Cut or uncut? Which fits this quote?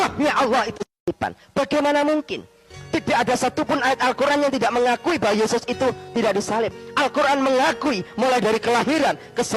cut